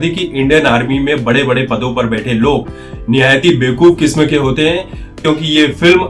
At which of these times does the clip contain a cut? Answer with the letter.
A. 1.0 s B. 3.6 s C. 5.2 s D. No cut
C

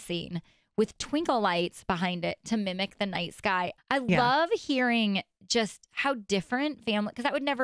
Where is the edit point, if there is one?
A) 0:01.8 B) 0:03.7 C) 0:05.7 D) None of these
B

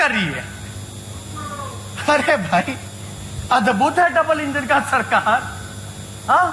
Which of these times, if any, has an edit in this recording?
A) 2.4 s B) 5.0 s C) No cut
C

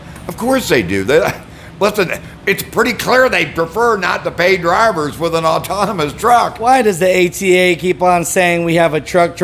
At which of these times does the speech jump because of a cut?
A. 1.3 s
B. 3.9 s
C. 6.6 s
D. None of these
C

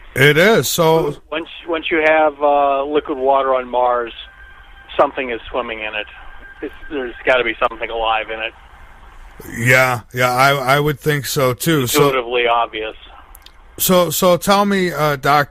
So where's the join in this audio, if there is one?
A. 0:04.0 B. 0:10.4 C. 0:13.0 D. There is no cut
B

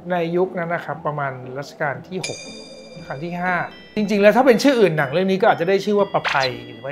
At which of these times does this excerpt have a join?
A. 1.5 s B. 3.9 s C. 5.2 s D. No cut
B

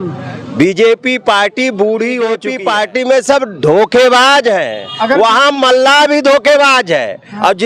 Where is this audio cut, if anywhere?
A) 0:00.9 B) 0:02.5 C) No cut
B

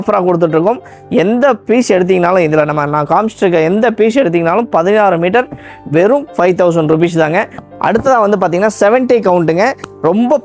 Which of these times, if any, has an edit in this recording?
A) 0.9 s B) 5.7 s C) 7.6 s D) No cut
C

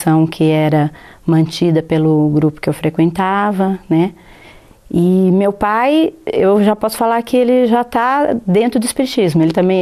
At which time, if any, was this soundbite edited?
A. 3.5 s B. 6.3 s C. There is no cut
A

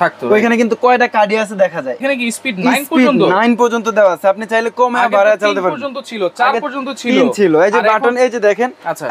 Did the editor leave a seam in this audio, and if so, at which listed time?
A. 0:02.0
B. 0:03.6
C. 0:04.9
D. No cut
A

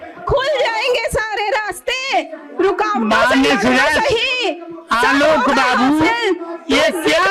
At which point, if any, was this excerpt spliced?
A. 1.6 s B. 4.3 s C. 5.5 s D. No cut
D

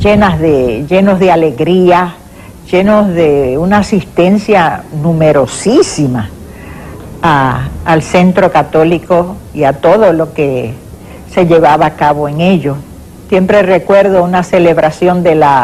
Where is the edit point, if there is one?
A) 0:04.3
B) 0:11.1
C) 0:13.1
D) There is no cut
D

